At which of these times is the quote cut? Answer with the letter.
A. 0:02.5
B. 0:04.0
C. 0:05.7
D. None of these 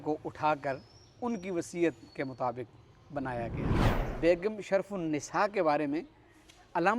B